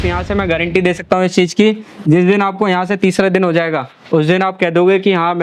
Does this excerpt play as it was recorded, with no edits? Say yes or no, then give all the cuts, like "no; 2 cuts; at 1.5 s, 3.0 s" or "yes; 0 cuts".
yes; 0 cuts